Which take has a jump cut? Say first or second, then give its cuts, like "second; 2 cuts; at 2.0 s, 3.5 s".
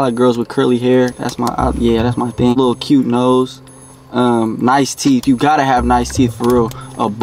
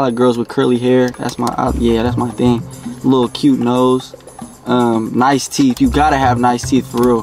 first; 1 cut; at 2.6 s